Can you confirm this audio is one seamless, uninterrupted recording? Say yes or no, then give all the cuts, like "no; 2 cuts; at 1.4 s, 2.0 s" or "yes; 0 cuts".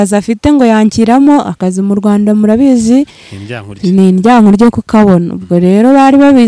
yes; 0 cuts